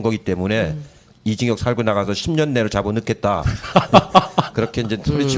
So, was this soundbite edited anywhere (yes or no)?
yes